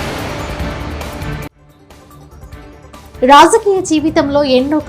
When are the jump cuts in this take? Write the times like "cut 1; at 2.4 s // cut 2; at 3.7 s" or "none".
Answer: cut 1; at 1.6 s